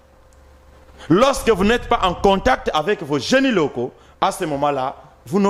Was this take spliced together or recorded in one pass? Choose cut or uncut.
uncut